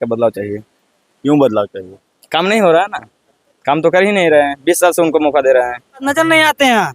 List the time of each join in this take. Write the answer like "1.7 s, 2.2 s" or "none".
5.9 s